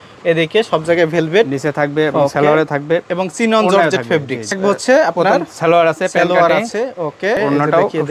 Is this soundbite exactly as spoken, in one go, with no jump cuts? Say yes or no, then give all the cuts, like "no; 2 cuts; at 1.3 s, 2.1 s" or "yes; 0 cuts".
no; 2 cuts; at 4.5 s, 7.4 s